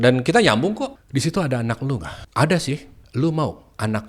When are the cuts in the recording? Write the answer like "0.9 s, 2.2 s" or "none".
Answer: 0.9 s, 2.2 s, 3.0 s